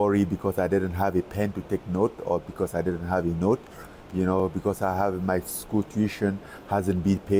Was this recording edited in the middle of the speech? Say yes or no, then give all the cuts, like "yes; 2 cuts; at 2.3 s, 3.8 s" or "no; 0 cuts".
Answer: no; 0 cuts